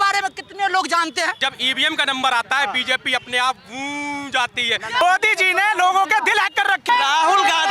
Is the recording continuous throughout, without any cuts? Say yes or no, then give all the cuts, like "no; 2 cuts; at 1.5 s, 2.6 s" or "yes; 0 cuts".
no; 3 cuts; at 1.4 s, 5.0 s, 6.9 s